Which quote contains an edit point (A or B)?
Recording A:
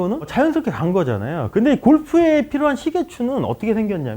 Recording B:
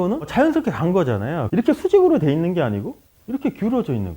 B